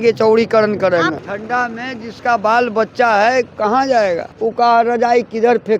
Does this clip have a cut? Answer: yes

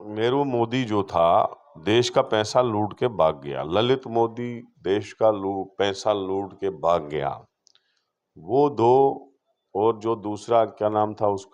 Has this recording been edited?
no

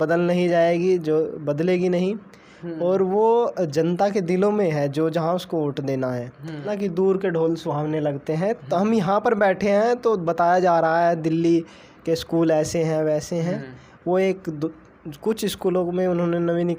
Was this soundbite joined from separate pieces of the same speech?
yes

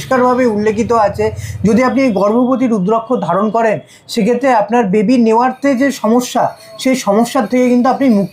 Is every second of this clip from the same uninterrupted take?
yes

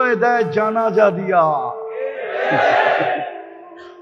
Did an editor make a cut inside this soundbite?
no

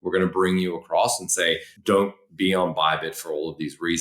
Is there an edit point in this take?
yes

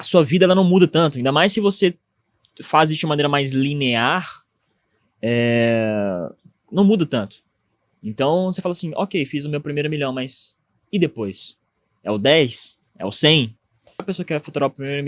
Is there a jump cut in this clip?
yes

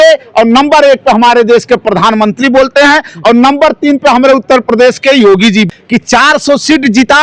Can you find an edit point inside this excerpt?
yes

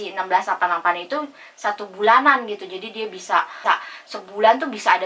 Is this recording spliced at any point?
yes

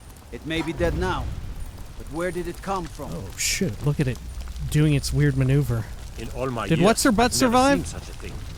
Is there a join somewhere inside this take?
no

